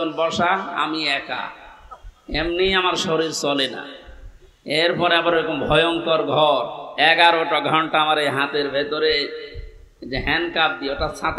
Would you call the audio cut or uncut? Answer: cut